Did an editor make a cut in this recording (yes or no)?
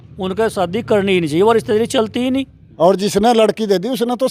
yes